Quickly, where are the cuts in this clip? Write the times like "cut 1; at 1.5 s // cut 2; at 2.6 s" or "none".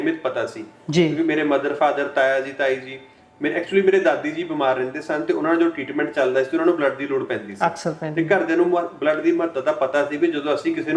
none